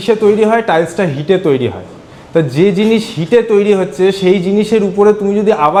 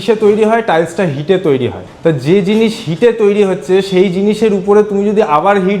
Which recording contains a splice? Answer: second; 1 cut; at 1.8 s

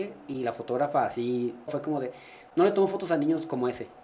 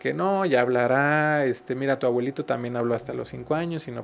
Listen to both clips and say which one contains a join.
first; 1 cut; at 1.7 s

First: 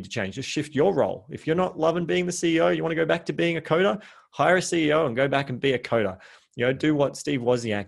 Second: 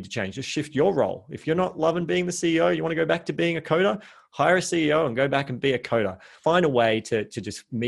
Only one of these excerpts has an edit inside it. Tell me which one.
second; 1 cut; at 6.4 s

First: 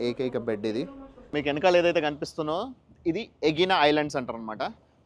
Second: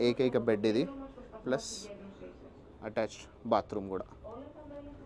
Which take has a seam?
first; 1 cut; at 1.2 s

